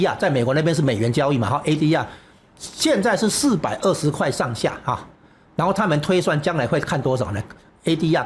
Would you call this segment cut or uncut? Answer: uncut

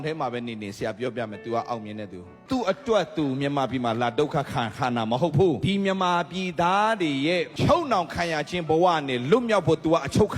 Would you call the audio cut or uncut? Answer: cut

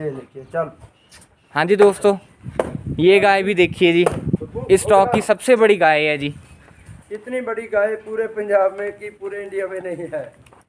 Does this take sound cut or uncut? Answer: uncut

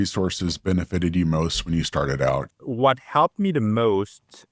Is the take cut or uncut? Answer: cut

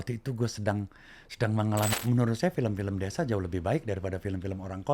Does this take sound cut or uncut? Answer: cut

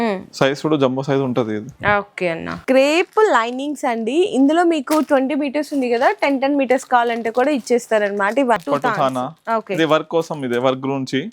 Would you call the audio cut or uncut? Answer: cut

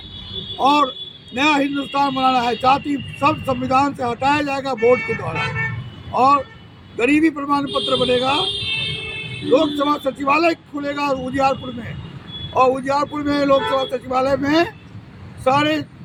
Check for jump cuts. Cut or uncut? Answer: uncut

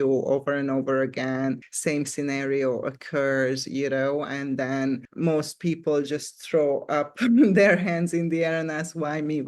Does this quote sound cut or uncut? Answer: uncut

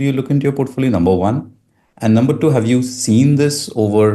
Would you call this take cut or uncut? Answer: uncut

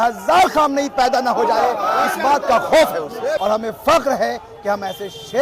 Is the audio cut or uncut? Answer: cut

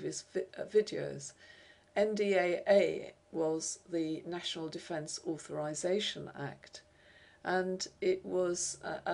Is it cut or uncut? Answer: cut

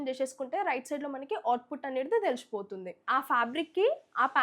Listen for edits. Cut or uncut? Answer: cut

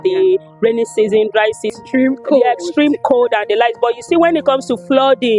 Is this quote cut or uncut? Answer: cut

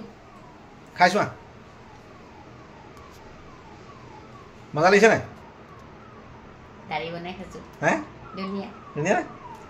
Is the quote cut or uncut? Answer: uncut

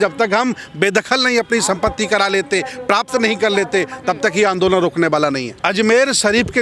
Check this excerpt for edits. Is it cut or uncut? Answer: cut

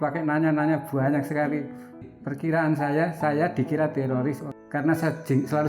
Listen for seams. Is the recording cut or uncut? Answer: cut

